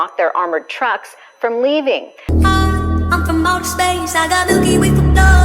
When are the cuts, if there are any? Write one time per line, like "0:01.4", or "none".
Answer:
0:02.1